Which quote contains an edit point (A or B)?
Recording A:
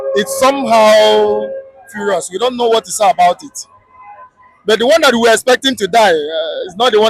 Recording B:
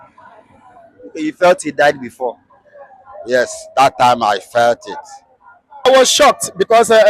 B